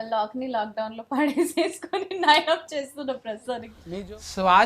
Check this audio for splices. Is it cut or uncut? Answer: cut